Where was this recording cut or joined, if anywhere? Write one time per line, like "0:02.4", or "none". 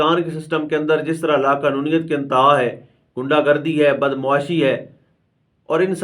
none